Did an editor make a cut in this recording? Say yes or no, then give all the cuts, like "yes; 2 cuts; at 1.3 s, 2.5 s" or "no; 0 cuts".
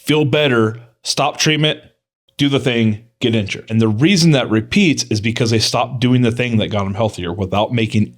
yes; 1 cut; at 3.6 s